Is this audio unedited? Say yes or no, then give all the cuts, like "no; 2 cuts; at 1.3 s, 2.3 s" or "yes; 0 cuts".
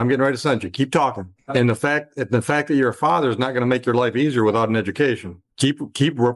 no; 2 cuts; at 1.3 s, 5.4 s